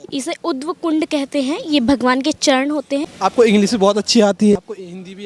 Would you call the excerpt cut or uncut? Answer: cut